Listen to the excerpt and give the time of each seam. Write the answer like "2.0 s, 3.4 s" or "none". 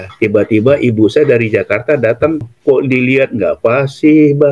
2.4 s